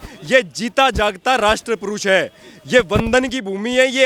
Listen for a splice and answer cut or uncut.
uncut